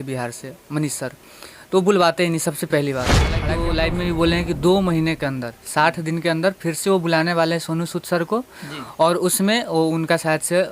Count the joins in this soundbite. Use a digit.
1